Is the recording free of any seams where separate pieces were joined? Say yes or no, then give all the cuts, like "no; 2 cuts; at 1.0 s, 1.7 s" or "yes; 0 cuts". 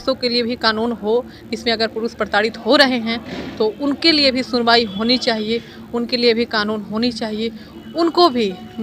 yes; 0 cuts